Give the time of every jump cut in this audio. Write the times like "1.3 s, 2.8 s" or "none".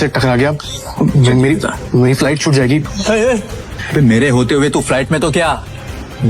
2.8 s, 3.7 s